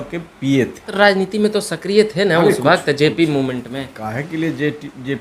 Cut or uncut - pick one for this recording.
cut